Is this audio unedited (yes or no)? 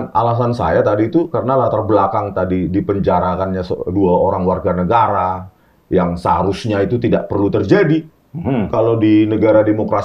yes